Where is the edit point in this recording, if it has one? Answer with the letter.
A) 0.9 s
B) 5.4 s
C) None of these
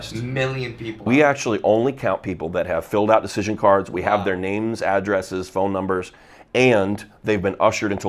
A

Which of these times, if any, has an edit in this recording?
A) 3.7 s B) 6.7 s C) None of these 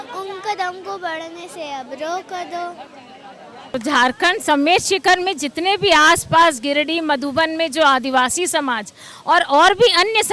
A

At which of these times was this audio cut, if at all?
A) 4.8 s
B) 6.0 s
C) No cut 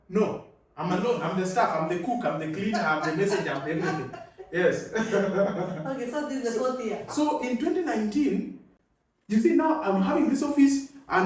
C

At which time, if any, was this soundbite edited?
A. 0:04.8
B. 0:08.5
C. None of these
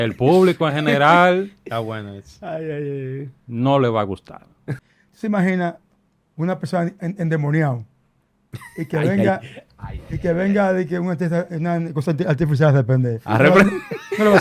A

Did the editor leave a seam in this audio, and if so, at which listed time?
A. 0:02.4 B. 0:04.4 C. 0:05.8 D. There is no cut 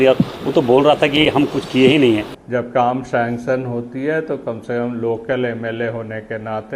A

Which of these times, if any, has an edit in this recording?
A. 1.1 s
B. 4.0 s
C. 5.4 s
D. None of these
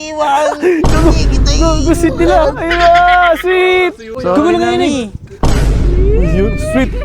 B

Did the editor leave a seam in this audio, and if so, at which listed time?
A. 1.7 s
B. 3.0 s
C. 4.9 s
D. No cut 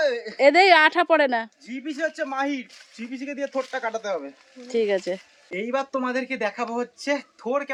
D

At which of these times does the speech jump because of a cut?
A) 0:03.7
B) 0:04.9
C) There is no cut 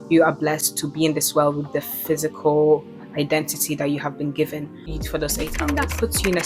B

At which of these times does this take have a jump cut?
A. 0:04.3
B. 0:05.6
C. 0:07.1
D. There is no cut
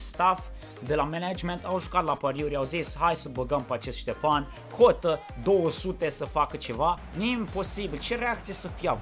C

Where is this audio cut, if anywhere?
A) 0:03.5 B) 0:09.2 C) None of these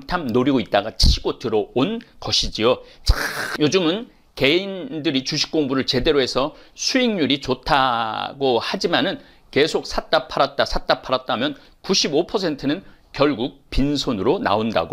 A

